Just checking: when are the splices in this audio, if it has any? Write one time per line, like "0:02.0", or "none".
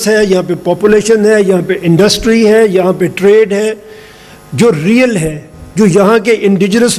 none